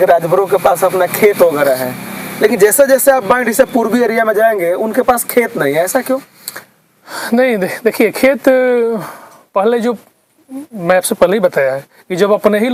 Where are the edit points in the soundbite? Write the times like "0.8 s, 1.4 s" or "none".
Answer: none